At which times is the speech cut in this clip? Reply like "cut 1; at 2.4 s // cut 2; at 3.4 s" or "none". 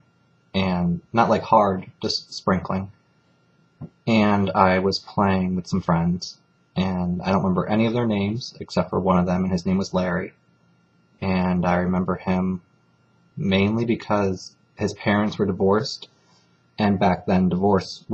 cut 1; at 2.3 s

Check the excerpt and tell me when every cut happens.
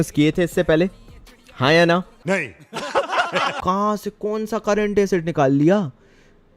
cut 1; at 3.5 s

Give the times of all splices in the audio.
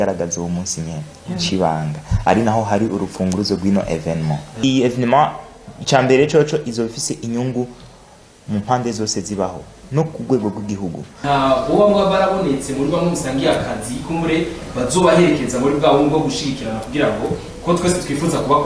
cut 1; at 4.6 s // cut 2; at 11.1 s

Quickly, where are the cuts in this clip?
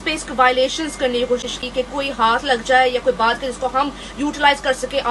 none

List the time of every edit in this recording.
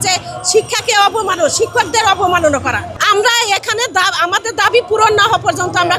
cut 1; at 2.9 s

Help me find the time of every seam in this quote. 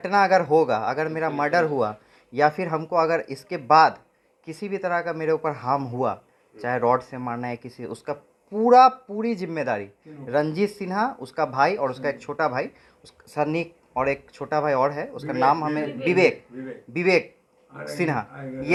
none

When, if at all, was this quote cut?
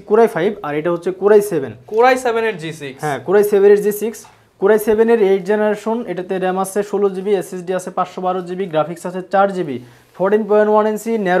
none

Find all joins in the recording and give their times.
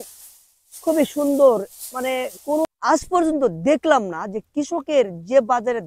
cut 1; at 2.6 s

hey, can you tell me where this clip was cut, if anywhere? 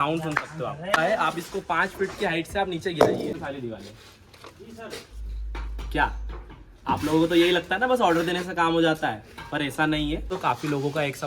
cut 1; at 1.0 s // cut 2; at 3.4 s // cut 3; at 10.3 s

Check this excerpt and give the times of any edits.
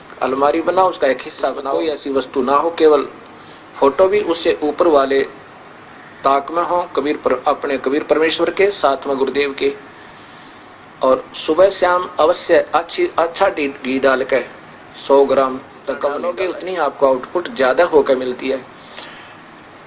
cut 1; at 1.6 s // cut 2; at 16.3 s

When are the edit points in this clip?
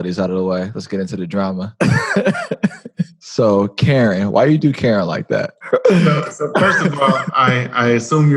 cut 1; at 1.7 s // cut 2; at 3.1 s // cut 3; at 5.6 s

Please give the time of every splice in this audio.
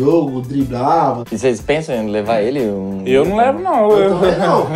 cut 1; at 1.3 s

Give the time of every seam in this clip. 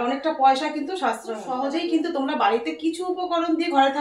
cut 1; at 1.7 s

